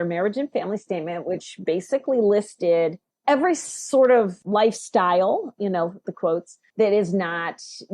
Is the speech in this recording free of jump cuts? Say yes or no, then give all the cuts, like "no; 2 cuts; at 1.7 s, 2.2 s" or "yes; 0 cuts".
no; 3 cuts; at 3.1 s, 4.4 s, 6.6 s